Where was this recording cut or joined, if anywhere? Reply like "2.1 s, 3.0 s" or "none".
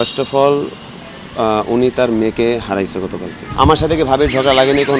3.4 s